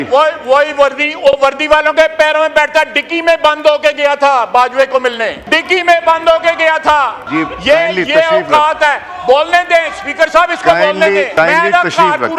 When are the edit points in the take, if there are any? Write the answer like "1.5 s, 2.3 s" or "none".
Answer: 5.4 s, 7.2 s, 11.3 s